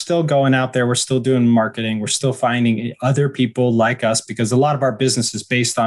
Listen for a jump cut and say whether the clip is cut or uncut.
uncut